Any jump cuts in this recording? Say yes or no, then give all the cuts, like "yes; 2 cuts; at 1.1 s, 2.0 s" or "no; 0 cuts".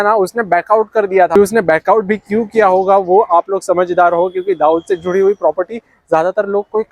no; 0 cuts